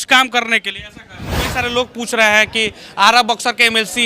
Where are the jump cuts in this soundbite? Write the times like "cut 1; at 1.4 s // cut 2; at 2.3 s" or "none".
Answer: cut 1; at 1.5 s